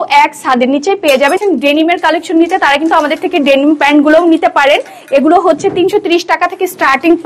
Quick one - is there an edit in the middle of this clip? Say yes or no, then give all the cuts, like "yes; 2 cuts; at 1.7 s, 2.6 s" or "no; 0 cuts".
yes; 1 cut; at 1.4 s